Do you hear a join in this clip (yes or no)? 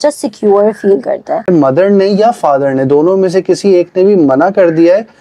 yes